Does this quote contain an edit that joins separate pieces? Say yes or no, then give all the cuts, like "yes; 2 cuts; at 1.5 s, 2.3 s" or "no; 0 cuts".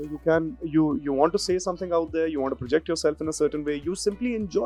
no; 0 cuts